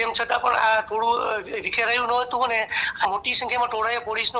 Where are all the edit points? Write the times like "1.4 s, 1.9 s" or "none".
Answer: 3.1 s